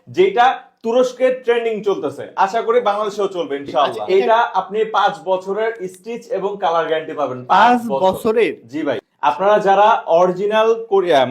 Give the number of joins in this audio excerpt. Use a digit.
2